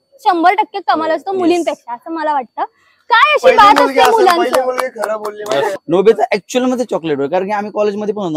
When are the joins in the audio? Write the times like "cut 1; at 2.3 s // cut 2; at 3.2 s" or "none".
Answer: cut 1; at 5.8 s